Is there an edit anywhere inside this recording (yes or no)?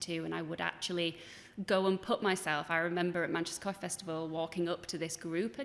no